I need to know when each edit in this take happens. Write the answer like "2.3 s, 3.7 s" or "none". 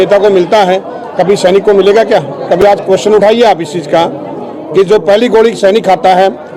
none

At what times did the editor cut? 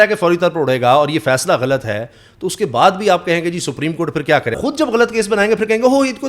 4.5 s

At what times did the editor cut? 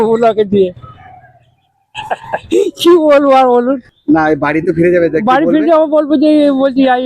3.9 s

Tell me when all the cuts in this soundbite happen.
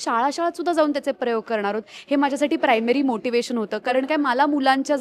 none

